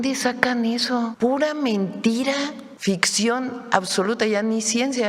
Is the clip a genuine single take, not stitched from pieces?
no; 2 cuts; at 1.1 s, 2.7 s

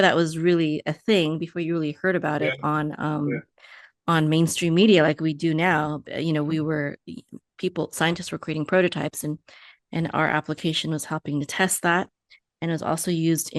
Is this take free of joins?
yes; 0 cuts

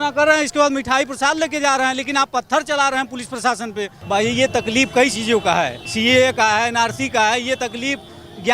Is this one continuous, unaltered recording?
no; 2 cuts; at 3.9 s, 5.8 s

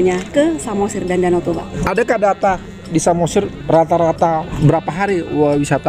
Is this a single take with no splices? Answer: no; 2 cuts; at 1.6 s, 4.5 s

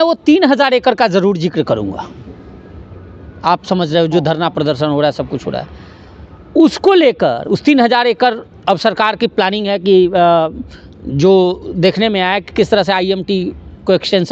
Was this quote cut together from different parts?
no; 0 cuts

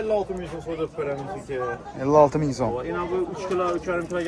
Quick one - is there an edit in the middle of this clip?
no; 0 cuts

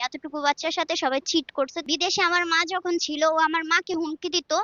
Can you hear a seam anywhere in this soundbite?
yes; 1 cut; at 1.8 s

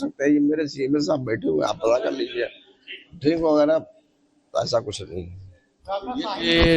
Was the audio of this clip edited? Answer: yes; 1 cut; at 2.3 s

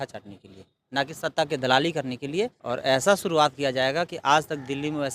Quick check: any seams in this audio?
yes; 1 cut; at 2.6 s

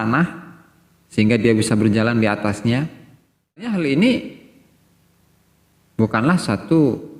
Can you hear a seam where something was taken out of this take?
yes; 1 cut; at 3.7 s

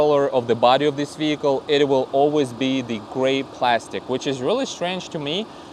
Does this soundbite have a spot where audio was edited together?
no; 0 cuts

